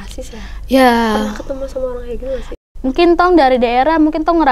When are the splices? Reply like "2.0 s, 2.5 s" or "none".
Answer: 2.5 s